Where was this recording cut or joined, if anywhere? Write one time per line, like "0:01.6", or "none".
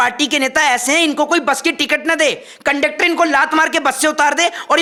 none